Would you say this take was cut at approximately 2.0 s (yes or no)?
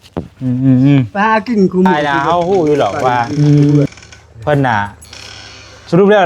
yes